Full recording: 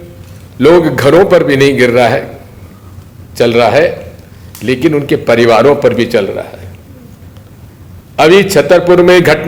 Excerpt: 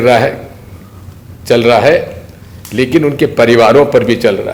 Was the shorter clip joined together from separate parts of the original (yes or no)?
no